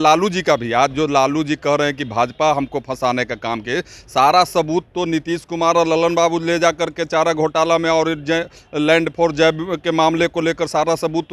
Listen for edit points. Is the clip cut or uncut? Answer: uncut